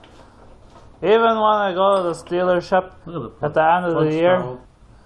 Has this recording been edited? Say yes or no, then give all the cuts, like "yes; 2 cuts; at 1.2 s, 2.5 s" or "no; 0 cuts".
no; 0 cuts